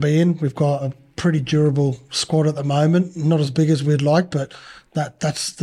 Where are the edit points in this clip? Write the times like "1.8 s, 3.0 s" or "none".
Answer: 1.0 s